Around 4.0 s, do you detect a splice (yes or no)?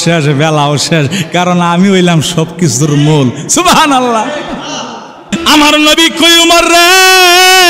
no